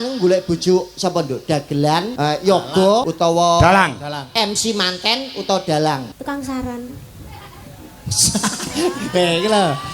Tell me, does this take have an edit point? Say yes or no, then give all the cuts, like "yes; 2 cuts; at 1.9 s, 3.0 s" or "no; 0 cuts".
yes; 3 cuts; at 2.1 s, 3.1 s, 6.1 s